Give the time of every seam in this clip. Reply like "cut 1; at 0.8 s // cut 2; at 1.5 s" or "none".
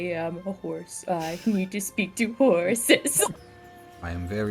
cut 1; at 3.3 s